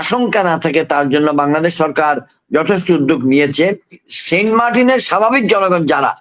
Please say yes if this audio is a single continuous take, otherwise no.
no